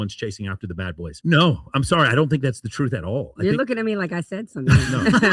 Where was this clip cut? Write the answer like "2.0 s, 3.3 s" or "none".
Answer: 1.1 s